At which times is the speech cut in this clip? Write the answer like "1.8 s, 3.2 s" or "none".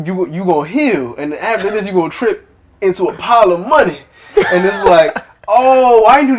none

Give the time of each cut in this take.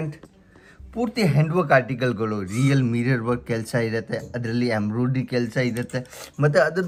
none

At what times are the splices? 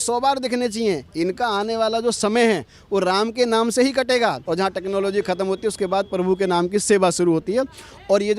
4.4 s

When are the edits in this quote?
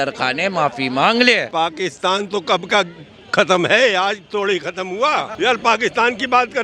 1.5 s, 5.3 s

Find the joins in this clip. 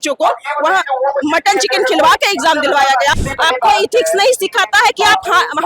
3.1 s

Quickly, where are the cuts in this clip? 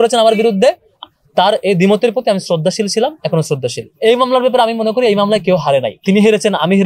1.0 s, 3.9 s, 5.9 s

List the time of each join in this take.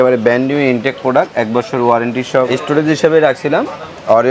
2.4 s

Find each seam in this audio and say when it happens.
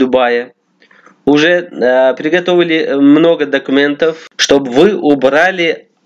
4.3 s

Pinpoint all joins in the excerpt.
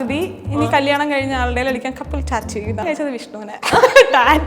2.8 s

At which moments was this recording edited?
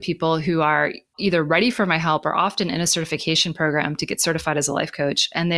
1.2 s

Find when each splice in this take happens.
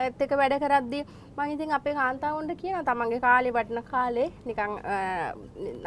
none

